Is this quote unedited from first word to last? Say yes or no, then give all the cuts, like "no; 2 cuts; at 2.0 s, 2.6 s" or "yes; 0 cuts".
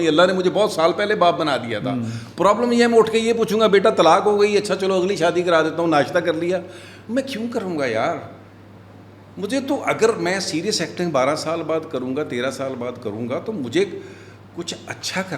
yes; 0 cuts